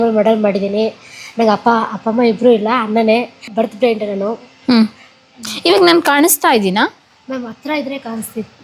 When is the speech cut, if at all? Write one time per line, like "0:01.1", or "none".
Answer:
0:03.4